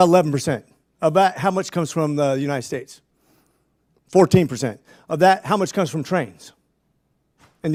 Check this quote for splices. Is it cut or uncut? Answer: uncut